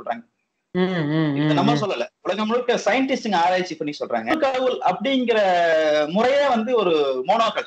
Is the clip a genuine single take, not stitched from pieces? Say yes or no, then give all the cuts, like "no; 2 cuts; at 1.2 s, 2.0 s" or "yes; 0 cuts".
no; 1 cut; at 4.3 s